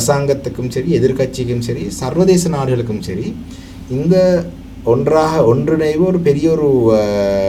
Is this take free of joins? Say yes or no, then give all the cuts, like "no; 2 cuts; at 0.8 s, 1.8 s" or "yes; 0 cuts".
yes; 0 cuts